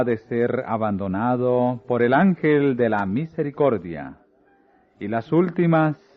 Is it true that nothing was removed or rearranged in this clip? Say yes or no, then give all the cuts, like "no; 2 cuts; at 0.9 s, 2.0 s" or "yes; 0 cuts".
no; 1 cut; at 5.2 s